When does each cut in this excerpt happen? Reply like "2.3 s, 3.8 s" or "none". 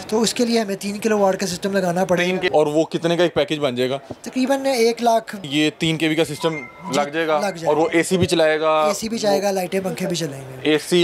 2.5 s, 5.4 s